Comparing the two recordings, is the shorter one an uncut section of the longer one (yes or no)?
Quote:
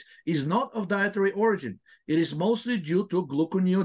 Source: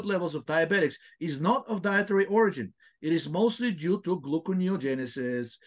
yes